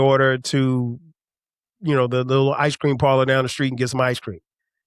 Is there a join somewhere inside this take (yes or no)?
no